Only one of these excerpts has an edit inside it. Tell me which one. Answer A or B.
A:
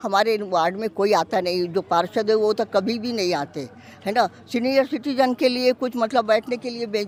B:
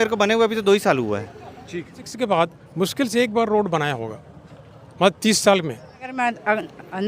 B